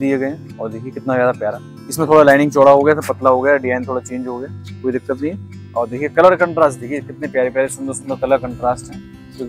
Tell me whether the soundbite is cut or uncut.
uncut